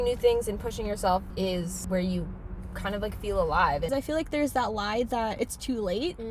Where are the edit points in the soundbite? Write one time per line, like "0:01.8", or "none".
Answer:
0:03.9
0:05.3

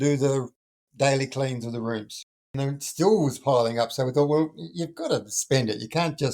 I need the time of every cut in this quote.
0:02.4

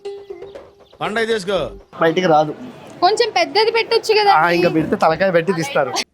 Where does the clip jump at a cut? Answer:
0:01.9

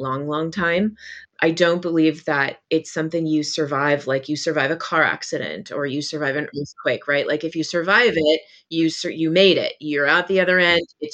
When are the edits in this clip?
0:01.2

